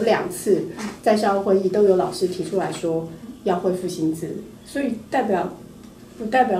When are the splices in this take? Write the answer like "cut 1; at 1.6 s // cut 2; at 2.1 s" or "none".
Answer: none